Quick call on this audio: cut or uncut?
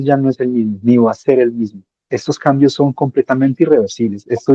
uncut